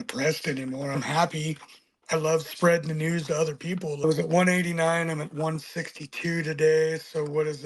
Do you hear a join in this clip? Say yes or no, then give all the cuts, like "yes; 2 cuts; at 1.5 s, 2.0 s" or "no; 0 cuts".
yes; 2 cuts; at 0.9 s, 4.0 s